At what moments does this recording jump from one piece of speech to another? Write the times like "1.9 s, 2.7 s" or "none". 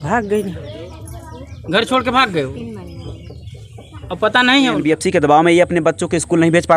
4.8 s